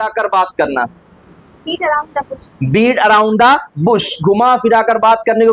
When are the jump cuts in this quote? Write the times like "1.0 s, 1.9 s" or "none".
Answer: none